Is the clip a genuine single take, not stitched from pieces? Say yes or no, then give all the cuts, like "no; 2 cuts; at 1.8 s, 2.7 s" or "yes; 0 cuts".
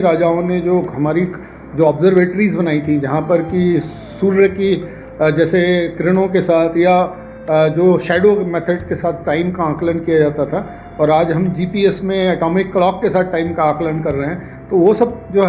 yes; 0 cuts